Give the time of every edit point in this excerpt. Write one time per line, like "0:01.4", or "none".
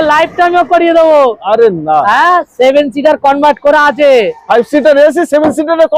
none